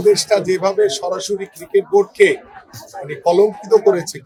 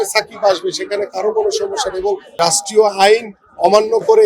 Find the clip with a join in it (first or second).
second